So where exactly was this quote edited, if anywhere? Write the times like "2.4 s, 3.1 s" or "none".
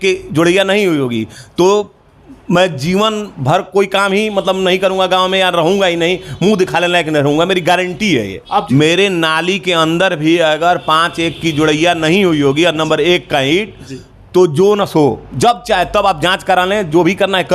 8.7 s